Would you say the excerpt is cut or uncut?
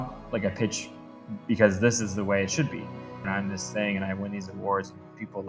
cut